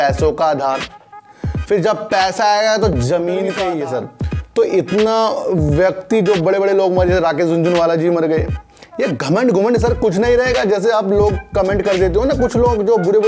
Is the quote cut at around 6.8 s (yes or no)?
no